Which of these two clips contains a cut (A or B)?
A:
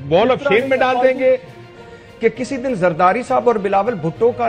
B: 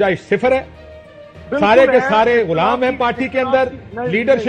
A